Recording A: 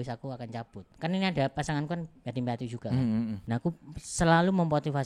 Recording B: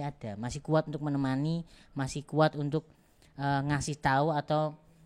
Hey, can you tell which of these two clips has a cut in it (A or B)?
A